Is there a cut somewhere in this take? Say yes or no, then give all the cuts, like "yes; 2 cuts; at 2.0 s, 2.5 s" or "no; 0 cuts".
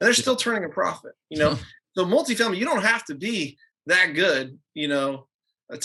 no; 0 cuts